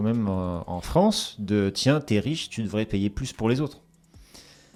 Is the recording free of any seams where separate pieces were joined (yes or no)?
yes